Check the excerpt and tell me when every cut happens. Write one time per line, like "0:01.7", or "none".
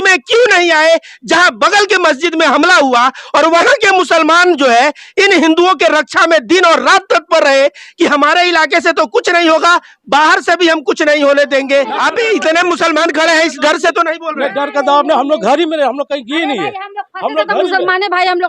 0:11.9